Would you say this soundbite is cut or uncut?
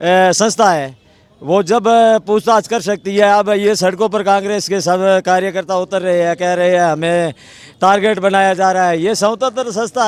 uncut